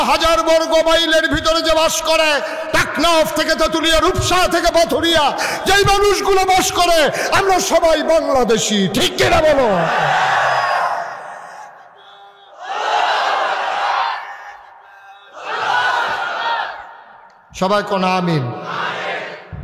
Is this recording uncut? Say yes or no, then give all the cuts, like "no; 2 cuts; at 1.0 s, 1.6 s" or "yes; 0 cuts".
yes; 0 cuts